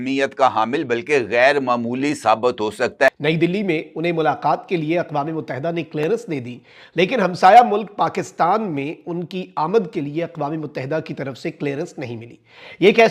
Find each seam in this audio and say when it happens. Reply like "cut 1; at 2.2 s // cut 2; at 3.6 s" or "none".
cut 1; at 3.1 s